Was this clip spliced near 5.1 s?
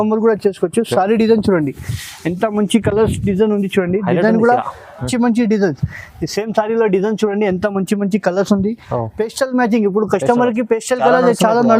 yes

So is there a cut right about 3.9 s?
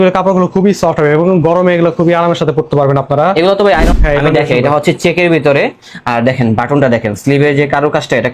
yes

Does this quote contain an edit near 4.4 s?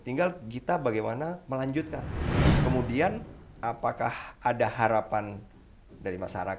no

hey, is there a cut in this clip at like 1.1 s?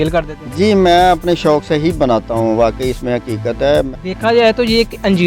no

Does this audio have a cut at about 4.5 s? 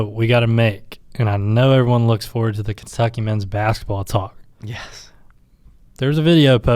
no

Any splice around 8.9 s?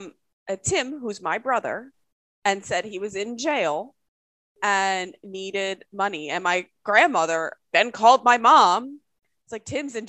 no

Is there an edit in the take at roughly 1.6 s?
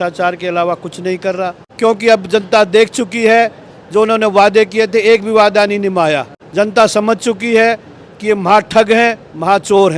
yes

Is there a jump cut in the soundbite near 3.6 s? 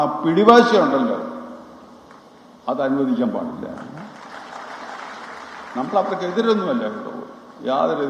no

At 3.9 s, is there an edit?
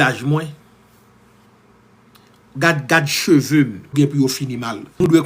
yes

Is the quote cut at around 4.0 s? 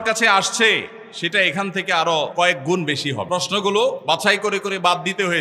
yes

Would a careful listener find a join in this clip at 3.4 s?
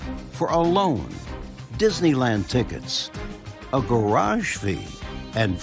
no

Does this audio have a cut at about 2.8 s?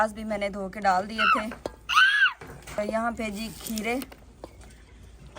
yes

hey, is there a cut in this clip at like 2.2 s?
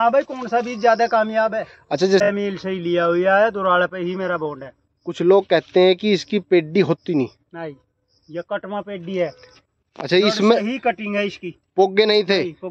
yes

